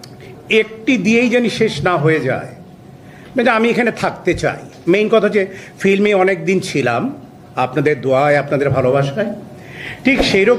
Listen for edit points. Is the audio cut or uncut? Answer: uncut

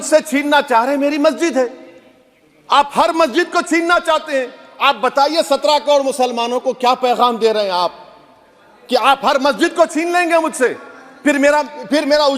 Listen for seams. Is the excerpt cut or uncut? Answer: uncut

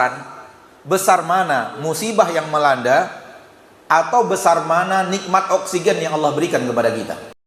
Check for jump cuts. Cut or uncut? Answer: uncut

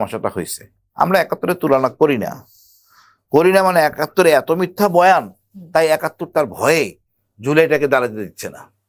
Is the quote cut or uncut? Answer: uncut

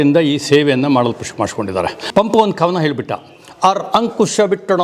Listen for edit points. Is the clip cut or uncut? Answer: cut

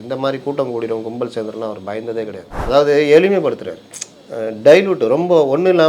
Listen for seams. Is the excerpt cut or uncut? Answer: cut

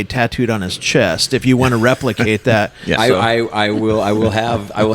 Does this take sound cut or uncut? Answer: cut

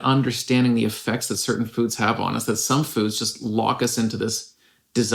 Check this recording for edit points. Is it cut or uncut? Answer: uncut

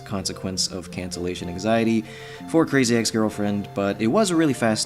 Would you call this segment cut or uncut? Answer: cut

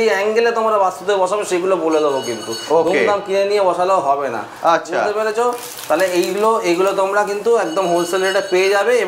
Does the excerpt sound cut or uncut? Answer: uncut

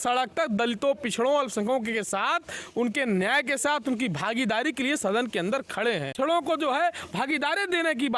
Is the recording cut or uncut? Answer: cut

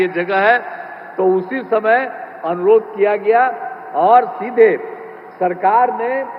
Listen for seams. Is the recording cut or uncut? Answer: uncut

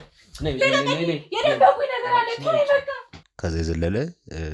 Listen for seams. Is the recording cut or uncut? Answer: cut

